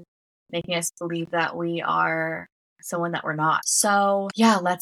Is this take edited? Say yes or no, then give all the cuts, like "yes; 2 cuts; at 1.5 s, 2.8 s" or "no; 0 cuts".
no; 0 cuts